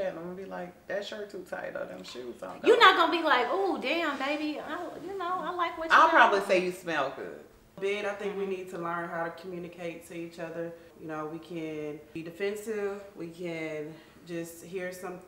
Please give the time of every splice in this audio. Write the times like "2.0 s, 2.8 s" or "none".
7.8 s, 10.9 s, 12.0 s